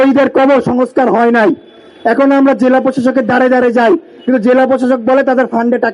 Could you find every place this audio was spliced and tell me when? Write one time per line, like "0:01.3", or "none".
none